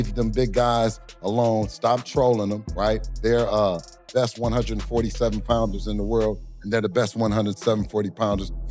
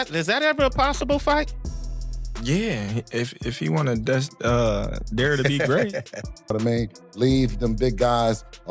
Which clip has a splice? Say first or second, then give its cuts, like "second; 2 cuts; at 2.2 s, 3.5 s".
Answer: second; 1 cut; at 6.5 s